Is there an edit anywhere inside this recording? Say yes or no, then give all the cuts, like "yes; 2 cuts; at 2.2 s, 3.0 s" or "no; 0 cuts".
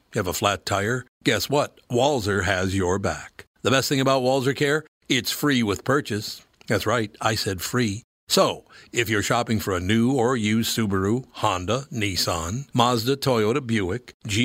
no; 0 cuts